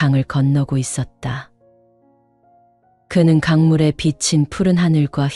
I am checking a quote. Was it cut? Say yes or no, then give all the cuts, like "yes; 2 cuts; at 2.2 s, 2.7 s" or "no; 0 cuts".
no; 0 cuts